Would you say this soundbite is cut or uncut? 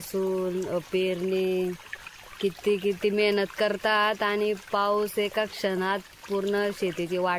uncut